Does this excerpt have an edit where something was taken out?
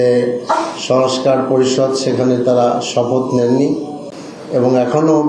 no; 0 cuts

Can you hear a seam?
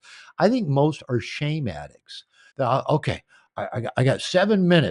yes; 1 cut; at 2.4 s

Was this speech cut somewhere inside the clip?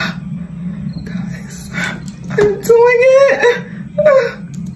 no; 0 cuts

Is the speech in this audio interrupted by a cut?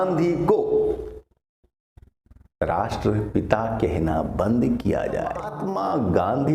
yes; 1 cut; at 5.5 s

